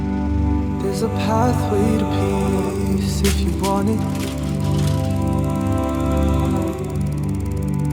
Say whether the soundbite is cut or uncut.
uncut